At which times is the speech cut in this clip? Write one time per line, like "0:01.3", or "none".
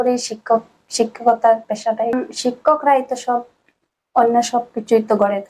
0:02.1